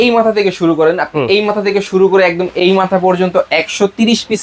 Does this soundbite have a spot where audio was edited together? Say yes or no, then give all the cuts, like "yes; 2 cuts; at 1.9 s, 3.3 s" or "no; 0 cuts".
no; 0 cuts